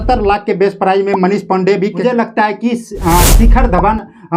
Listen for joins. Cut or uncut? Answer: cut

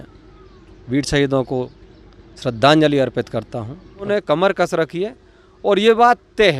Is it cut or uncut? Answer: cut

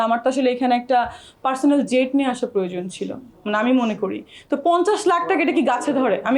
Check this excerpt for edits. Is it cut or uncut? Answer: uncut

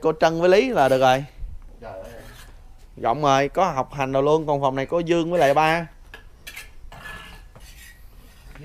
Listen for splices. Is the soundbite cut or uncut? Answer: uncut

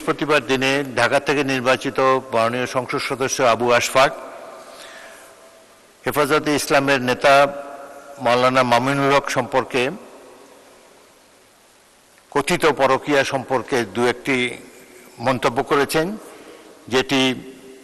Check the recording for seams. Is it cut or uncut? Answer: uncut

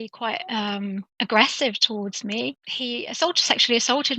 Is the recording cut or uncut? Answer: cut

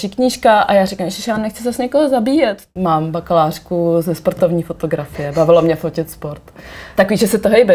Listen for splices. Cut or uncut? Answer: cut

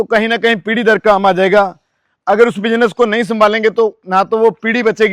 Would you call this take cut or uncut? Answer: uncut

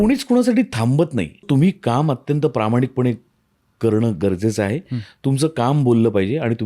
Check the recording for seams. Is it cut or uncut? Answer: cut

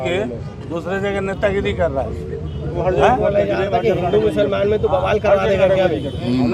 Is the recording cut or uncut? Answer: uncut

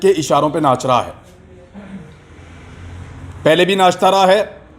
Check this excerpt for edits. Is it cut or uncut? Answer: uncut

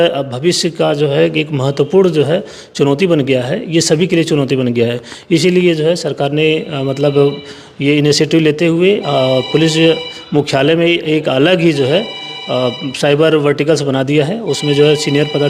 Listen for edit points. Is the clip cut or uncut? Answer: uncut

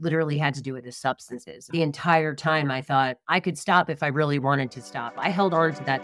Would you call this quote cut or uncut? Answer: cut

